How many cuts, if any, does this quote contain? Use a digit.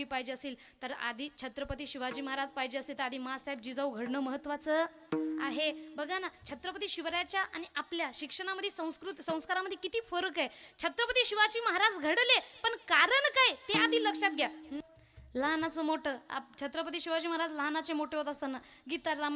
1